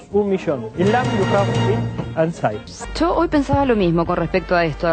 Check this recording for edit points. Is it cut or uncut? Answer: uncut